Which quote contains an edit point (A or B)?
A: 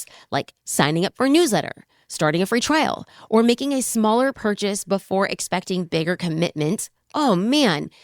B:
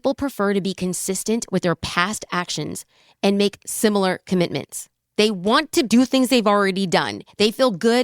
B